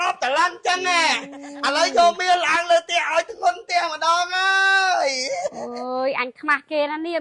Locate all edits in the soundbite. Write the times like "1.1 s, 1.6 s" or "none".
none